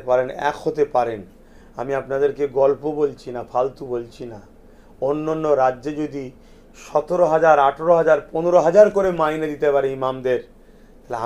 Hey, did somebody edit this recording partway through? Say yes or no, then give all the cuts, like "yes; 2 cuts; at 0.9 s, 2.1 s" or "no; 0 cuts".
no; 0 cuts